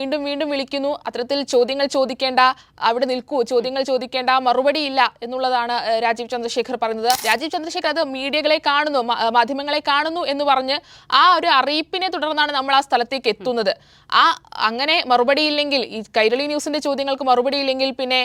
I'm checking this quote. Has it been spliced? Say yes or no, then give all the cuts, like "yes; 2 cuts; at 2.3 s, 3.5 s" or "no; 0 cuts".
yes; 1 cut; at 7.2 s